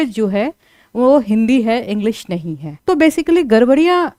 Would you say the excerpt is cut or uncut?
uncut